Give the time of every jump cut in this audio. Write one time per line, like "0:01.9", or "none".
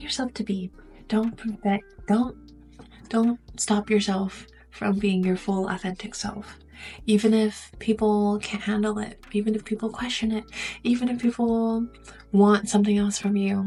none

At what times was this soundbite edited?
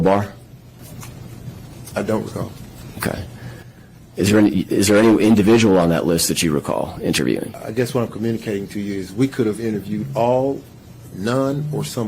0:07.6

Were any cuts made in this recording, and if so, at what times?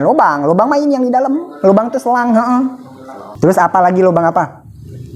0:03.2

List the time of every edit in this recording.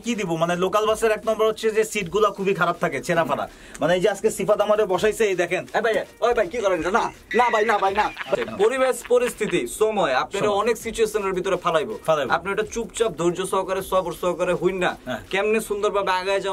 0:08.4

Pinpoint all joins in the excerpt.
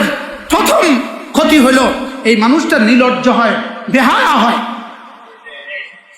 none

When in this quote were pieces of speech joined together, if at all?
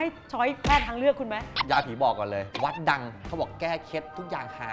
0:01.4
0:03.1

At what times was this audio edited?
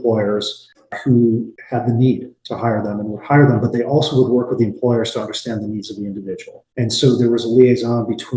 0:06.6

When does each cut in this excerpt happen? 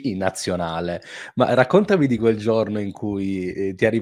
none

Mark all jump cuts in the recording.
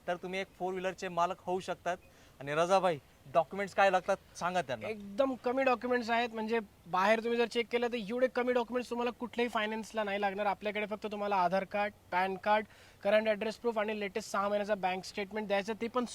none

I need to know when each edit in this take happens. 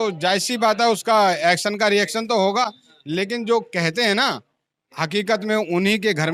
none

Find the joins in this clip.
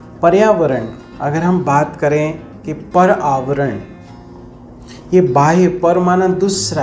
none

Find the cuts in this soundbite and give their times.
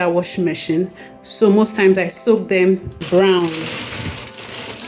0:03.0

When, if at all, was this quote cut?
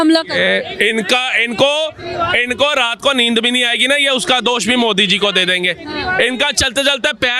none

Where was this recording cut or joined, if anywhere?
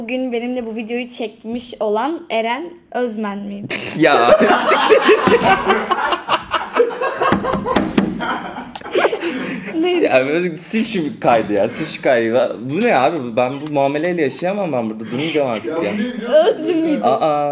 none

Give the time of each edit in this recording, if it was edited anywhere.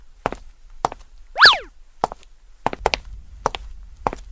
0:01.1

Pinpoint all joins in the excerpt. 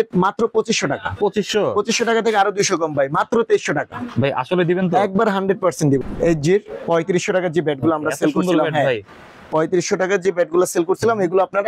0:06.0

